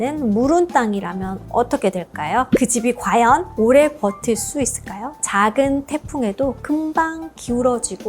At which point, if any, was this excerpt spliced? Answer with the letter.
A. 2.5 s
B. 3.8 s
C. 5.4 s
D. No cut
A